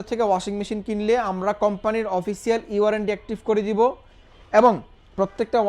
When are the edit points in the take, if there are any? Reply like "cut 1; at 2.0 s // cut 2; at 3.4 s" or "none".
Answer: none